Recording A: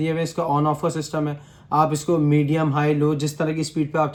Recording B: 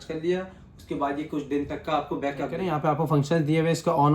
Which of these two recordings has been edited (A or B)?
B